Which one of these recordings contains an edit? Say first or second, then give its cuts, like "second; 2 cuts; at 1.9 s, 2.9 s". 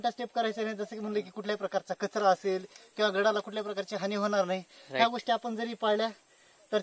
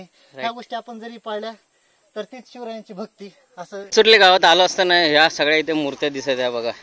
second; 1 cut; at 3.9 s